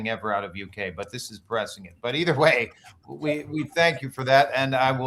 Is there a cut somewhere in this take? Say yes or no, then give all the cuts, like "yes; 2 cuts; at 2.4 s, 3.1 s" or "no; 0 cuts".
no; 0 cuts